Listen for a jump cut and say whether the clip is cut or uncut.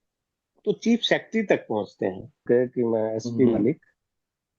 cut